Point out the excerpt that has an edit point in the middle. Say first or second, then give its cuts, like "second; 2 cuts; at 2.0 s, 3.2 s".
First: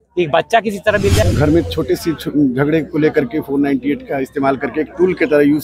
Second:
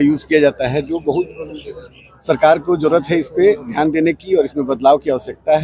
first; 1 cut; at 1.2 s